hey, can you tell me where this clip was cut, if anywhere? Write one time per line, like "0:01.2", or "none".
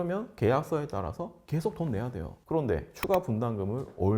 0:02.3

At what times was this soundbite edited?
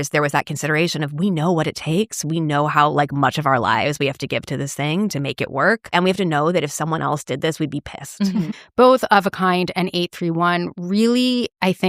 0:05.9
0:08.6

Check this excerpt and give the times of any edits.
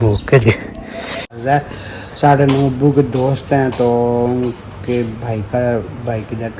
0:01.4

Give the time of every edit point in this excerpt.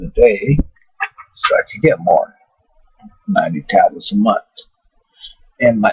none

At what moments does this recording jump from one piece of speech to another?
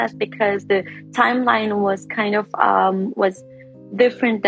none

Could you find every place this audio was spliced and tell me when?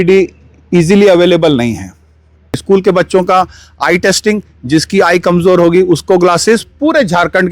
0:02.6

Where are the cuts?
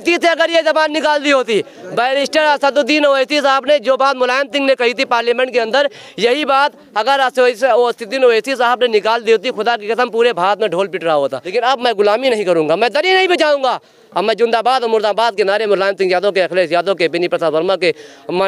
0:11.4

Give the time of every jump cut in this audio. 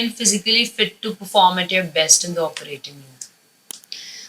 none

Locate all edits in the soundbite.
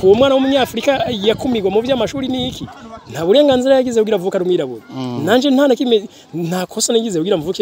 none

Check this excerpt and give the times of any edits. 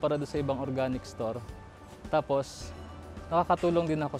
none

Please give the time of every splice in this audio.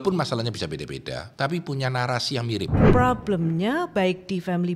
0:01.2
0:02.9

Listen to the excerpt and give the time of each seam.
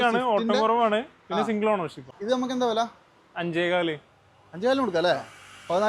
0:02.1

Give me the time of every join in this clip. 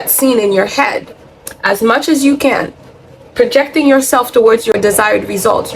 0:04.7

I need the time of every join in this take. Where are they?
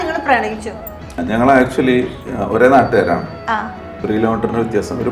0:01.1
0:04.0

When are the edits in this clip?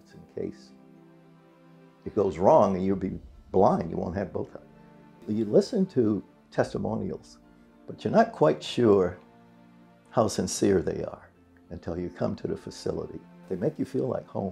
0:05.3
0:13.4

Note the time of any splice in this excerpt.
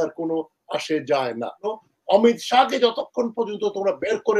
0:01.7

